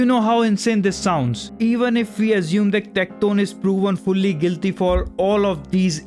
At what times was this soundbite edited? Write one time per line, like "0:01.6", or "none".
0:01.4